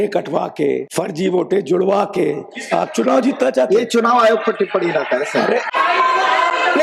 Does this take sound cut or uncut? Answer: cut